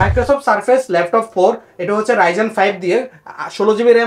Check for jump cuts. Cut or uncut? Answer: uncut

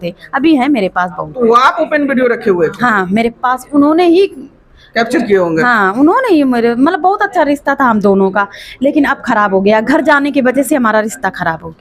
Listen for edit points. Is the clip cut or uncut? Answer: uncut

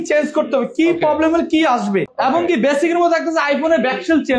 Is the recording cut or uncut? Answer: cut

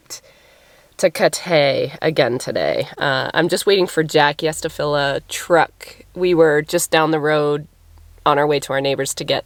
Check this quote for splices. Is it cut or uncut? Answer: uncut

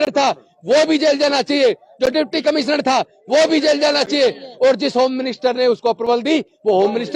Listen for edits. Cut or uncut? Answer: uncut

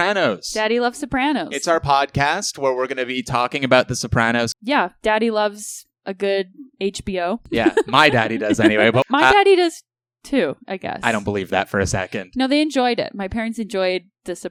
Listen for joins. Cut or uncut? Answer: uncut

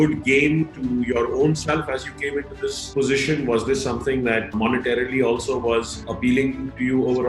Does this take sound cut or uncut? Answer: cut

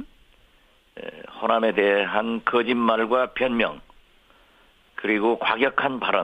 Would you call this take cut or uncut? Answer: cut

